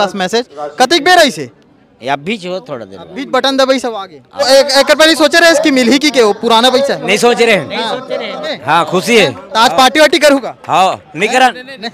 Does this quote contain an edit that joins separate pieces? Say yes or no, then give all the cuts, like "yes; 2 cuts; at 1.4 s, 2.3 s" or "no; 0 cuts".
yes; 2 cuts; at 4.4 s, 8.6 s